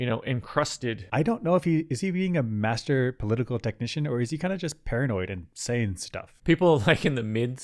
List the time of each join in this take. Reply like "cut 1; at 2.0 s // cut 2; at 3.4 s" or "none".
cut 1; at 1.0 s // cut 2; at 6.3 s